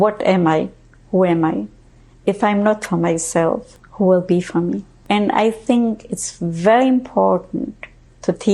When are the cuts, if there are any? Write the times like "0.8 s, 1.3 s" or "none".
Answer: 3.8 s, 4.9 s